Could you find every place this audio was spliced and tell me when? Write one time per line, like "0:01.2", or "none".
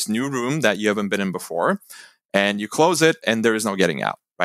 none